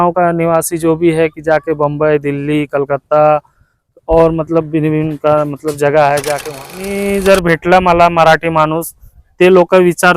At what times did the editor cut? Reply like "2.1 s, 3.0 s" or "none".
6.9 s